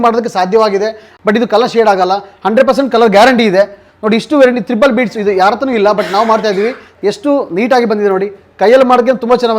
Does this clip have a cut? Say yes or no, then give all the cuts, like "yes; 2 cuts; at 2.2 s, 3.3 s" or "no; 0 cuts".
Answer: yes; 2 cuts; at 1.1 s, 6.9 s